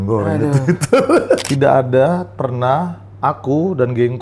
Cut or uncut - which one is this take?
cut